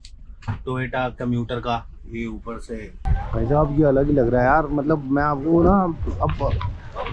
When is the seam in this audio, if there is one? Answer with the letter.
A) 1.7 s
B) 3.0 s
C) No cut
B